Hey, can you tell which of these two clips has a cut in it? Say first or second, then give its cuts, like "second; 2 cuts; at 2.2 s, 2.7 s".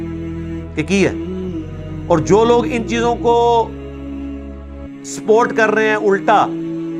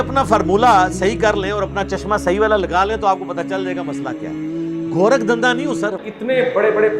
second; 3 cuts; at 3.4 s, 5.0 s, 6.0 s